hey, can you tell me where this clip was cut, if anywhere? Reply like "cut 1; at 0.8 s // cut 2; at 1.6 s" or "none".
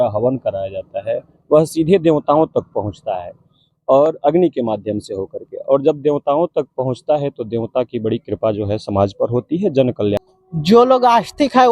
cut 1; at 10.2 s